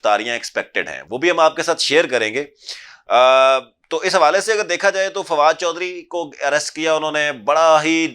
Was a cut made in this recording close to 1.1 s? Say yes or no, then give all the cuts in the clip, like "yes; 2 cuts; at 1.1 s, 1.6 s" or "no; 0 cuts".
no; 0 cuts